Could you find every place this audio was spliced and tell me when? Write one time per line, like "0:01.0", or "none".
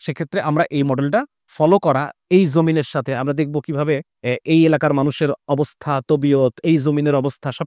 0:01.4
0:04.1